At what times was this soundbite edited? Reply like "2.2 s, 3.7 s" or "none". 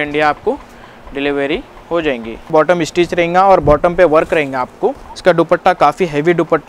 2.5 s, 5.1 s